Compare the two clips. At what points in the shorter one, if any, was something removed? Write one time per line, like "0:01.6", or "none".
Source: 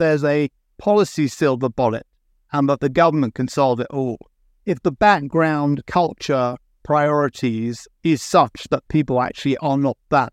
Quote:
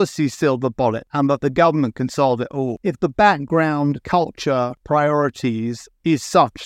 0:01.0
0:02.8
0:04.8